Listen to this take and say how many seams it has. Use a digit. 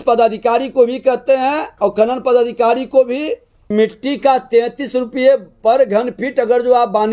1